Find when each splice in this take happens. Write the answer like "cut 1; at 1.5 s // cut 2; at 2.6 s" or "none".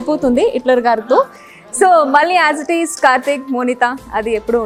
none